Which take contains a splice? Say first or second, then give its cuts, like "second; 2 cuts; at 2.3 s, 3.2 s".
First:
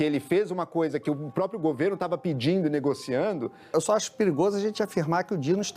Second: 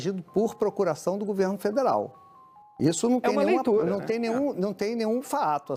first; 1 cut; at 3.6 s